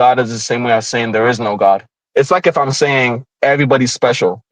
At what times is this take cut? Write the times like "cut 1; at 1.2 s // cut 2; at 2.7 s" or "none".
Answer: cut 1; at 2.0 s